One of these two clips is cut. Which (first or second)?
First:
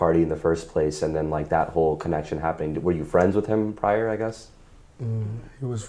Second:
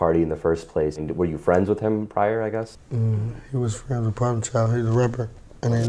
second